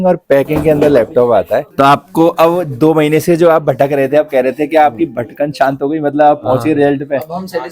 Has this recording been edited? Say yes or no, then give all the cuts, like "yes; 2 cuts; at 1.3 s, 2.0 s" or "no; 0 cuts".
yes; 1 cut; at 1.7 s